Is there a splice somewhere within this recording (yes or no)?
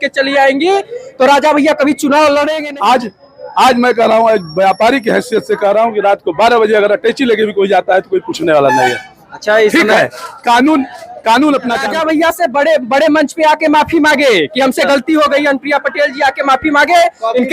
yes